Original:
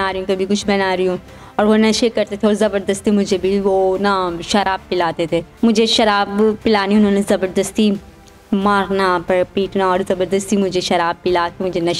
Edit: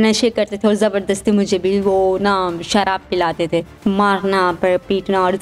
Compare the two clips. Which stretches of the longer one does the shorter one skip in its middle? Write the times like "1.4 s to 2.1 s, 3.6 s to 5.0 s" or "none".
5.5 s to 8.4 s